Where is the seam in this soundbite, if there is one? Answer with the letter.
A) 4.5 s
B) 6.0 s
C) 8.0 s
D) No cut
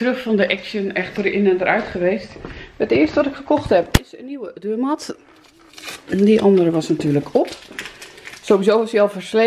D